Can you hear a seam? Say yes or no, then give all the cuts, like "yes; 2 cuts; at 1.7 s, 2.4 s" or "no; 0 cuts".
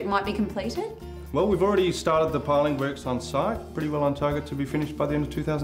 yes; 1 cut; at 3.7 s